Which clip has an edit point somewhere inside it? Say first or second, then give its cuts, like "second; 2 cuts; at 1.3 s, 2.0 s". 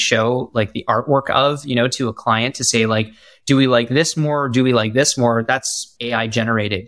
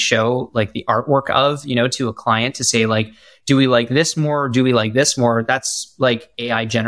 first; 1 cut; at 5.9 s